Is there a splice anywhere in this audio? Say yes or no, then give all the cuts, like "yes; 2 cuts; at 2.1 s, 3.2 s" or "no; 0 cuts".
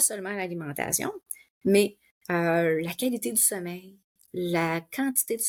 no; 0 cuts